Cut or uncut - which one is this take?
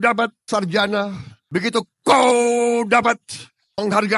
uncut